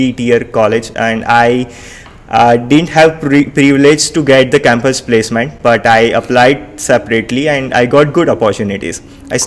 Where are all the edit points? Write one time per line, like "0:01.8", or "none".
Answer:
none